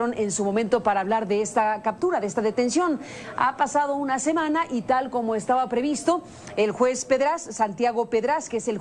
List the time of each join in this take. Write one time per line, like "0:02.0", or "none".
0:05.5